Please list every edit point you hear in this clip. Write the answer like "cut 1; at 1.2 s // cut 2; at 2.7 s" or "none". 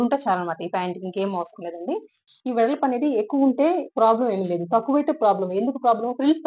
cut 1; at 2.3 s